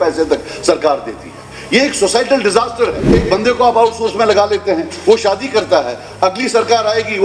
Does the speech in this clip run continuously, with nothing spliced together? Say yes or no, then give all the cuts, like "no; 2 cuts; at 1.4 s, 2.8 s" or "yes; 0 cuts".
no; 1 cut; at 3.1 s